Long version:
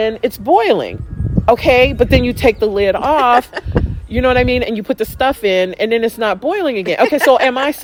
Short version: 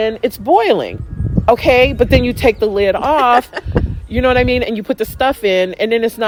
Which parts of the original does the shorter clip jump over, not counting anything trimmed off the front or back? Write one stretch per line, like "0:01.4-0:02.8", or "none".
none

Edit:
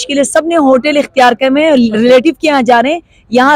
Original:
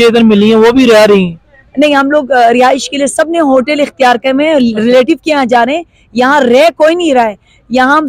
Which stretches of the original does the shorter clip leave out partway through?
none

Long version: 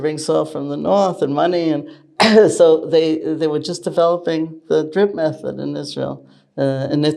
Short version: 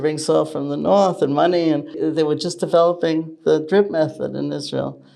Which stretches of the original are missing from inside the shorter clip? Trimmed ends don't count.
0:02.0-0:03.2

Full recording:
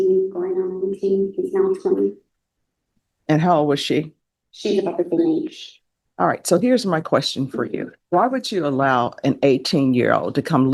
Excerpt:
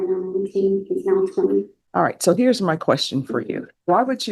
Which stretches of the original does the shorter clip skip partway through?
0:02.3-0:06.0

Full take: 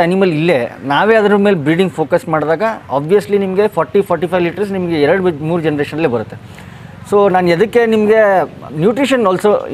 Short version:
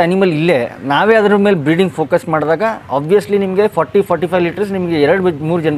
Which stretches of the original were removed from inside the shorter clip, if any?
none

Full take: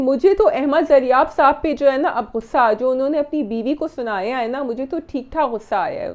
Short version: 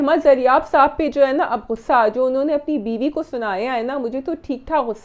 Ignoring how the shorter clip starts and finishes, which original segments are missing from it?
none

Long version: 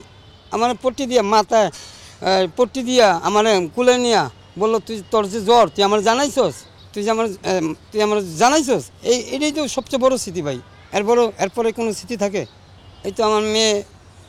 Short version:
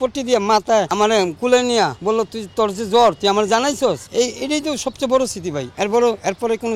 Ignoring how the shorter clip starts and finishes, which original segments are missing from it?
0:01.7-0:03.2
0:04.3-0:04.5
0:06.6-0:09.0
0:10.6-0:10.8

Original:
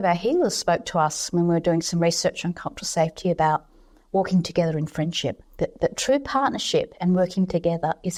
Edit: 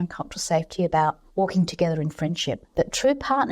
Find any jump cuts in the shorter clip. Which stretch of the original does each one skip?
0:03.7-0:04.0
0:05.5-0:05.7

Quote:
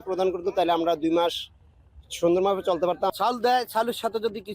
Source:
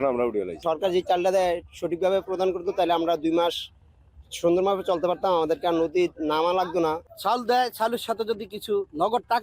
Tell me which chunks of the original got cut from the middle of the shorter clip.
0:05.3-0:07.1

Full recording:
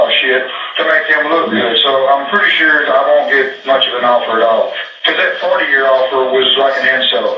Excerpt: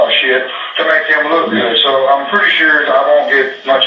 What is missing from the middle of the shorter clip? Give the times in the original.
none

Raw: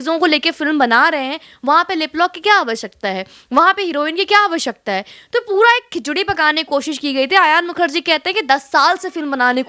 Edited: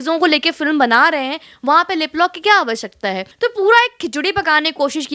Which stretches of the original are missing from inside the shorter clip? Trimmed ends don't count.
0:03.3-0:05.2

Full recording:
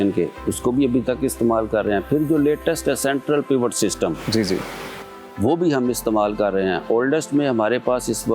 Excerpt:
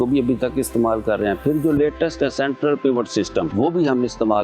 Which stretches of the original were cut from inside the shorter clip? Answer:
0:04.1-0:05.3

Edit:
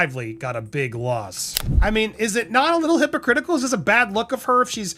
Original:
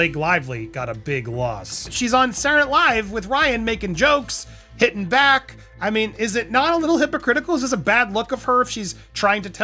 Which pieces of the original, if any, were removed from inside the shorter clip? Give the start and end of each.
0:01.9-0:05.5

